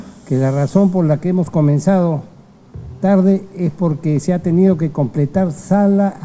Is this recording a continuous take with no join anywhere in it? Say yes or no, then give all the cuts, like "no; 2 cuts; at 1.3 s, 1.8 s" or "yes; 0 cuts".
yes; 0 cuts